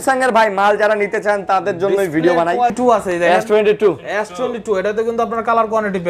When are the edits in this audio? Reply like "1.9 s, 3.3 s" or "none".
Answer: 2.7 s